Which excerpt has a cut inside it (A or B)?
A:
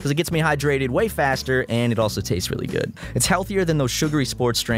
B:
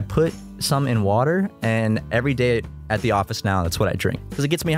A